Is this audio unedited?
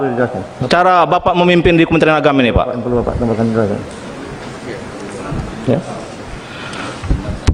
yes; 0 cuts

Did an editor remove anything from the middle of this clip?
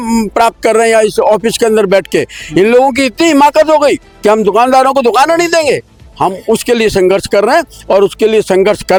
no; 0 cuts

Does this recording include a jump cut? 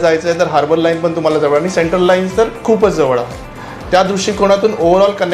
no; 0 cuts

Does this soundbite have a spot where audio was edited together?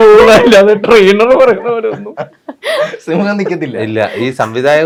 no; 0 cuts

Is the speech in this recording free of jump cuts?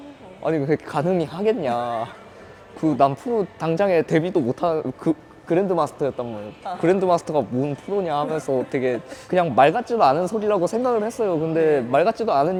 yes; 0 cuts

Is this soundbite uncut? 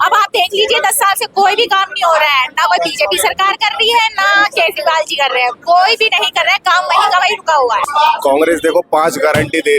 no; 1 cut; at 7.8 s

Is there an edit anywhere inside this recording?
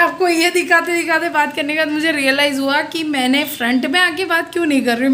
no; 0 cuts

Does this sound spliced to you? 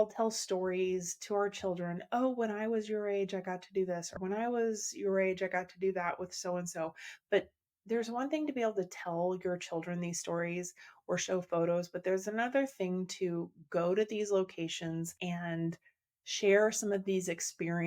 yes; 2 cuts; at 4.1 s, 15.1 s

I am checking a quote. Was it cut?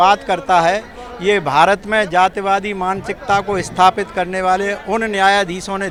no; 0 cuts

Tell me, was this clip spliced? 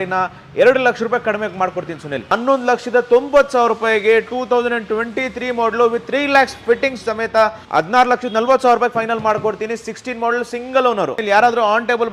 yes; 3 cuts; at 2.3 s, 7.6 s, 11.2 s

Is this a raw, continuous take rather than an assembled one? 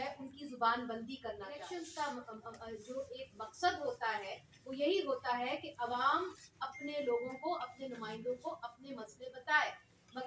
no; 1 cut; at 1.7 s

